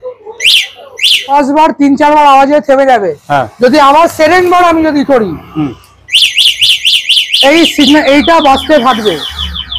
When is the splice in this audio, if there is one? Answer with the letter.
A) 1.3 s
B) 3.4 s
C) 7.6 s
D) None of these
A